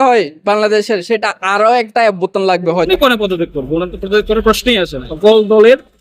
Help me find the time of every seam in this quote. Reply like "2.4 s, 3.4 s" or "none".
2.9 s, 5.1 s